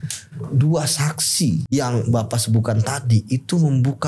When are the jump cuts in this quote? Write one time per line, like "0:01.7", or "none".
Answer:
0:01.6